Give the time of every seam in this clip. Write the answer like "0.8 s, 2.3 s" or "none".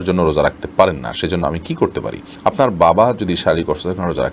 none